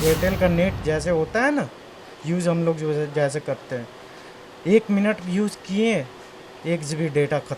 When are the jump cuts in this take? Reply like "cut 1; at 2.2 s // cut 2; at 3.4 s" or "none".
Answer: none